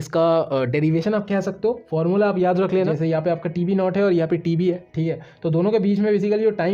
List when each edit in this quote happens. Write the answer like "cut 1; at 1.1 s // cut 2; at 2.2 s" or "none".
cut 1; at 2.9 s